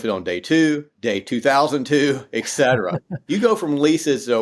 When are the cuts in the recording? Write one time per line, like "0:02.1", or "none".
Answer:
0:00.9
0:03.1